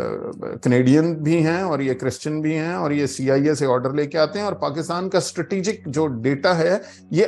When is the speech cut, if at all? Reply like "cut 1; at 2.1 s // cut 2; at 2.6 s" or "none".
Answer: none